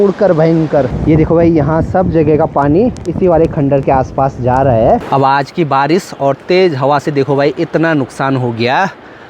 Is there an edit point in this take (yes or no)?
yes